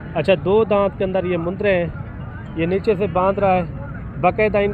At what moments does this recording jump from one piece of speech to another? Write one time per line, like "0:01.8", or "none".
none